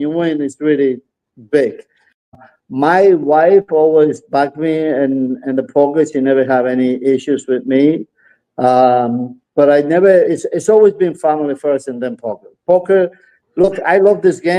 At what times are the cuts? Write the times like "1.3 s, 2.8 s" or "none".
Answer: 2.3 s